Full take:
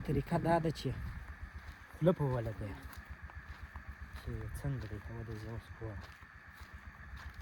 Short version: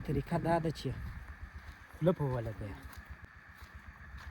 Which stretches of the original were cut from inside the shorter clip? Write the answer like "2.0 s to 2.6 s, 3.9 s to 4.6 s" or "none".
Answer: 3.2 s to 6.2 s